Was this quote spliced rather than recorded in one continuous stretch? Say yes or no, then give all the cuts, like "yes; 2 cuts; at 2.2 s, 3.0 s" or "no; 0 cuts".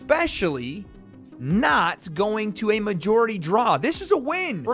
no; 0 cuts